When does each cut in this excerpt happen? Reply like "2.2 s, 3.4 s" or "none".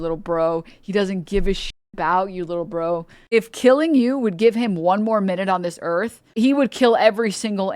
3.1 s